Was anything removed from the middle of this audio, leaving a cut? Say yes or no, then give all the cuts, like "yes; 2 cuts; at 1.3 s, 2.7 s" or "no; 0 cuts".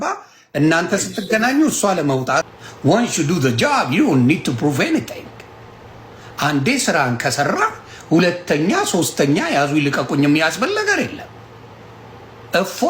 yes; 1 cut; at 2.6 s